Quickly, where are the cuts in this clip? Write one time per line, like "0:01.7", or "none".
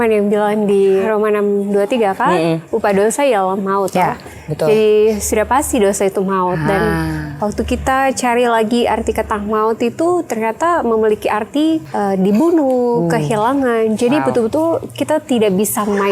0:01.0
0:11.9